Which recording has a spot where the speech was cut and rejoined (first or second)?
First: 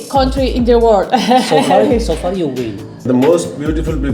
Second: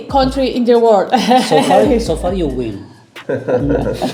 first